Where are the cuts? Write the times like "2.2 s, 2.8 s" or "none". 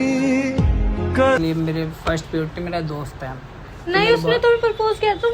1.4 s